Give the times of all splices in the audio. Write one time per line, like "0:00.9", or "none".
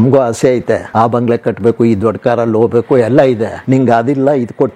0:01.0
0:03.5